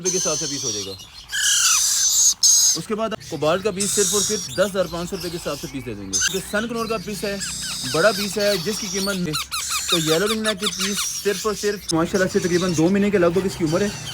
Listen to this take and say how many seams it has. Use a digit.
4